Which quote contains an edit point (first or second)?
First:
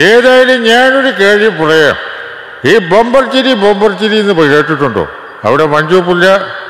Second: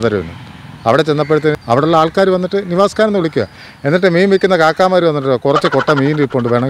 second